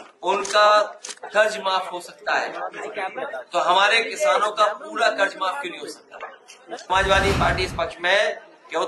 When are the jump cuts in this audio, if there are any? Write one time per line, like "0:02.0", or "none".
0:06.8